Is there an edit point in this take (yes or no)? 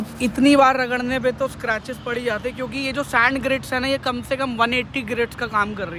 no